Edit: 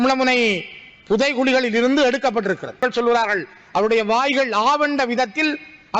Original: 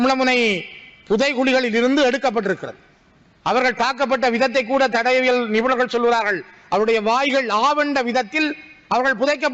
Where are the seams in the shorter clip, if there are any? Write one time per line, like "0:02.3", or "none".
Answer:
0:02.8